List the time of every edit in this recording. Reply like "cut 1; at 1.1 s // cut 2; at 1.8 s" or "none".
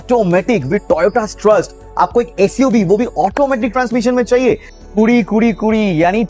cut 1; at 4.7 s